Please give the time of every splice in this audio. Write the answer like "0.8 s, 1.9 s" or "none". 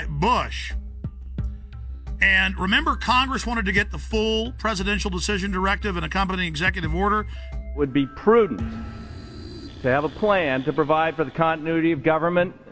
9.4 s